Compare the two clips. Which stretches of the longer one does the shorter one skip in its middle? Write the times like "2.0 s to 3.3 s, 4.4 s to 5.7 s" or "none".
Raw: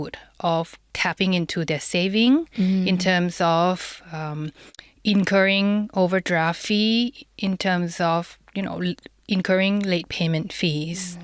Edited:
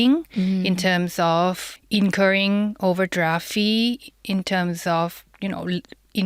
3.9 s to 4.9 s